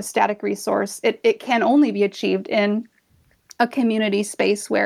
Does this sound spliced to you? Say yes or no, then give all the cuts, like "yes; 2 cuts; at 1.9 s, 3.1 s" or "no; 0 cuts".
no; 0 cuts